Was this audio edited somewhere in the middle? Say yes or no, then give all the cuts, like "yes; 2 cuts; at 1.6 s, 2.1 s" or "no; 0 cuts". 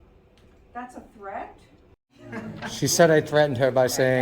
yes; 1 cut; at 2.3 s